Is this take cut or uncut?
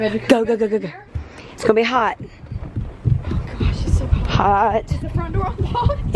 cut